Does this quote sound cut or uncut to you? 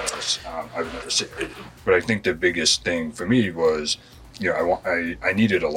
cut